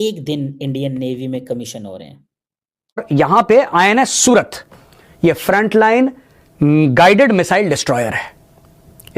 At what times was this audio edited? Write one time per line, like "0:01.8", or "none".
0:03.0